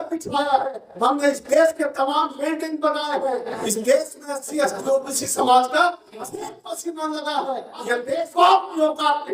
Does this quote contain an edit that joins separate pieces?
yes; 1 cut; at 8.0 s

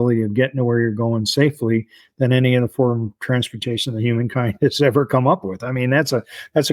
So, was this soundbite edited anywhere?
no; 0 cuts

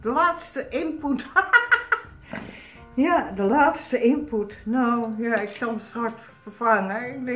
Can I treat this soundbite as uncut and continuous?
yes; 0 cuts

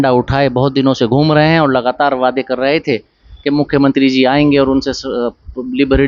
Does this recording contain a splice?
no; 0 cuts

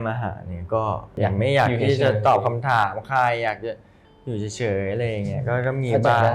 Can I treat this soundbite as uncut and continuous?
no; 1 cut; at 1.1 s

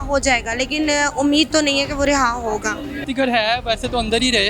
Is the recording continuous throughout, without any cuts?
no; 1 cut; at 3.0 s

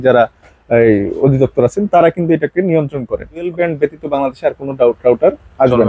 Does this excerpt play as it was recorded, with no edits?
no; 1 cut; at 3.5 s

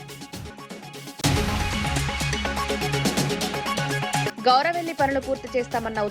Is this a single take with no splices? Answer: no; 2 cuts; at 1.2 s, 3.9 s

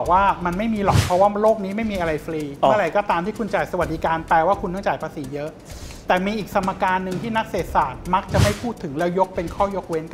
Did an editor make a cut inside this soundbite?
no; 0 cuts

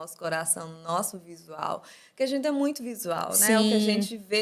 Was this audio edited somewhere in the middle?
no; 0 cuts

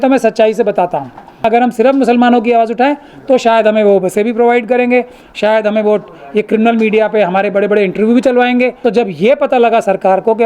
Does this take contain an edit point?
yes; 2 cuts; at 1.4 s, 8.8 s

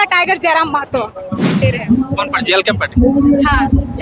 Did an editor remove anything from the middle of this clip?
yes; 1 cut; at 1.6 s

